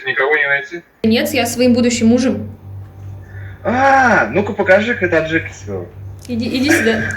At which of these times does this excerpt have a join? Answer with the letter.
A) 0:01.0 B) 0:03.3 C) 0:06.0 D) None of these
A